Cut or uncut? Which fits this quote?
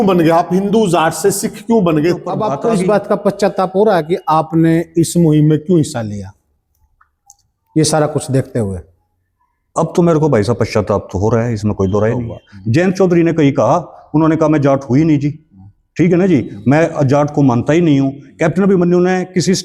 cut